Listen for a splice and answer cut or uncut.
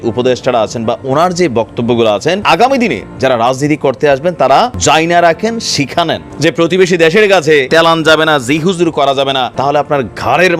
cut